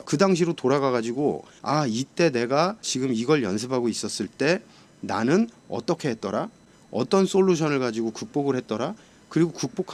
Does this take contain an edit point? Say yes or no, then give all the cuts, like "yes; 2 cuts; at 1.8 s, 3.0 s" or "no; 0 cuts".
no; 0 cuts